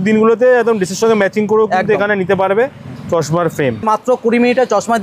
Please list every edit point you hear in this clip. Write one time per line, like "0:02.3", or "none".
0:03.8